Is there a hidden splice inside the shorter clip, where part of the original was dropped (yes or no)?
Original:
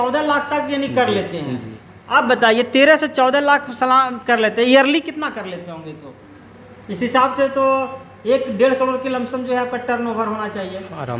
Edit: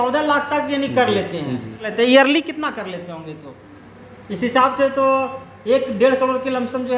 yes